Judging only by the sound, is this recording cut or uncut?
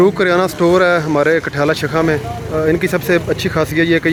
uncut